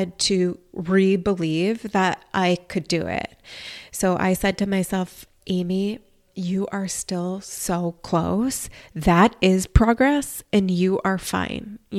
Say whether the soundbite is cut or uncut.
uncut